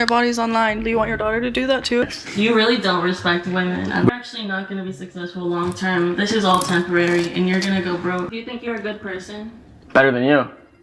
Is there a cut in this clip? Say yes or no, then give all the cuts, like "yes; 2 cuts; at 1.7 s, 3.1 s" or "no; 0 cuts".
yes; 3 cuts; at 2.1 s, 4.1 s, 8.3 s